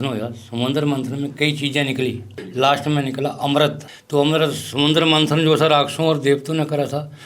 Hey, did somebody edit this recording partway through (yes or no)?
yes